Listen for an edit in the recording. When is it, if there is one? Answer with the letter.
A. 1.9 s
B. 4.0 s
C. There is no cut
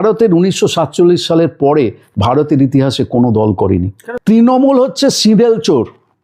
B